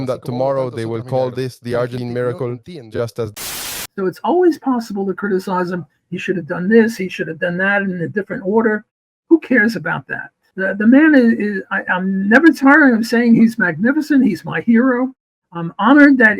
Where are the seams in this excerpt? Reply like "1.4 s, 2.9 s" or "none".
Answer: 2.0 s, 3.4 s